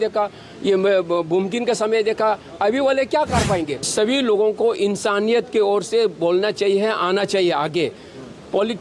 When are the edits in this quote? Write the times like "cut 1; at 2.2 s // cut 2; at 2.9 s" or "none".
cut 1; at 3.9 s

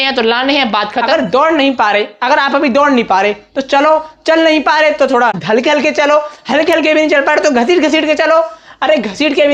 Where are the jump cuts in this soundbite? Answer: cut 1; at 1.0 s // cut 2; at 5.4 s

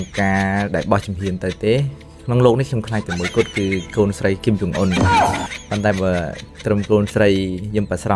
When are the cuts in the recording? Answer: none

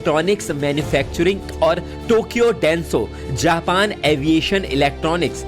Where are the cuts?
cut 1; at 4.2 s

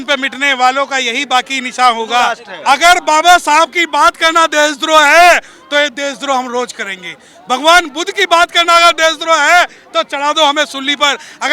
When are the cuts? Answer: cut 1; at 2.5 s

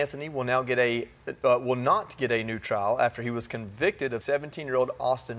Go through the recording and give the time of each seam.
cut 1; at 4.2 s

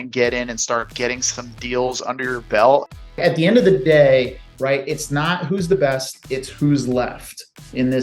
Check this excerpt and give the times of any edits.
cut 1; at 3.2 s

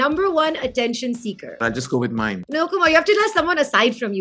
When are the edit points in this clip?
cut 1; at 1.6 s // cut 2; at 2.5 s

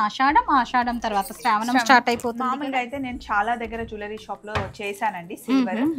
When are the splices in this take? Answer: cut 1; at 2.5 s

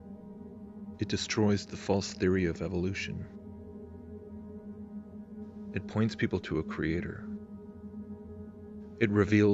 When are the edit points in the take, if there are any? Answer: cut 1; at 2.1 s

